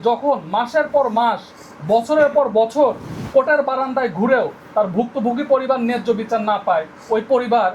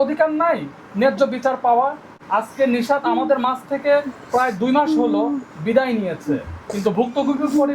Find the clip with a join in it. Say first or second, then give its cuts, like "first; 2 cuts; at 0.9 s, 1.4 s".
second; 1 cut; at 2.1 s